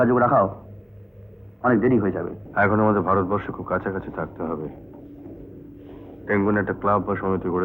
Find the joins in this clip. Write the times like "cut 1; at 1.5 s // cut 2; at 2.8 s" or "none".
cut 1; at 2.4 s